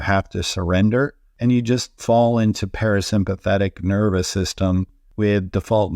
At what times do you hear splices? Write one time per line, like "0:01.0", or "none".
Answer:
0:01.2
0:05.0